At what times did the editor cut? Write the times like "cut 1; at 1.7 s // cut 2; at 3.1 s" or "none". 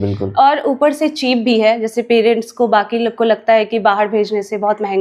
none